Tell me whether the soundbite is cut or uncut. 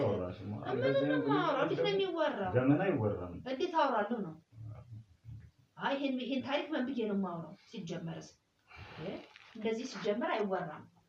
uncut